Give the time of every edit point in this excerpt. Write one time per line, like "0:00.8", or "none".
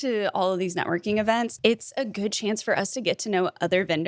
0:01.5